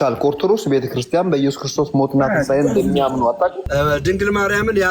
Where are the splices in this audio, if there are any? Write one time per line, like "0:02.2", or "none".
0:03.6